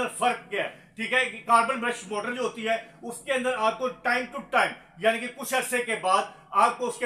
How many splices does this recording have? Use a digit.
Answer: 0